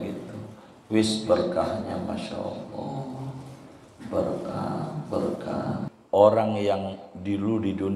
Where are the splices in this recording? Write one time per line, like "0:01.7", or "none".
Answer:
0:05.9